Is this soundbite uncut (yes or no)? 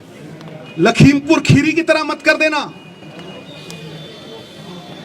yes